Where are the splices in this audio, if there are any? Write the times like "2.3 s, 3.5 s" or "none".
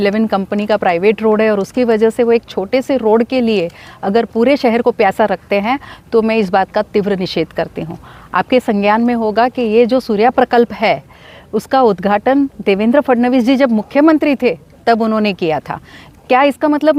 none